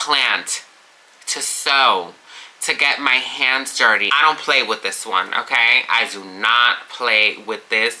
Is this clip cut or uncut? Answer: cut